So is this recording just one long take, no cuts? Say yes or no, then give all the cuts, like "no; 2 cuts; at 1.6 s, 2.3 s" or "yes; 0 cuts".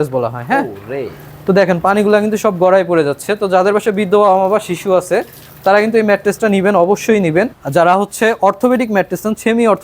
no; 1 cut; at 7.6 s